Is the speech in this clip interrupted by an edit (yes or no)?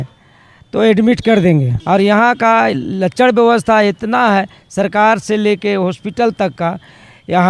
yes